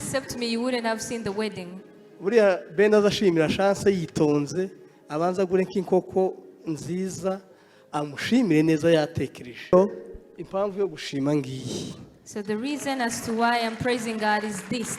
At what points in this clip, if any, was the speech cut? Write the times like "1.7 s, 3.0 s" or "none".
9.7 s